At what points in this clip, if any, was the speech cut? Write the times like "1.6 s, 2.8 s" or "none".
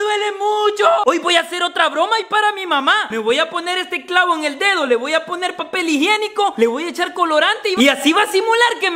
1.0 s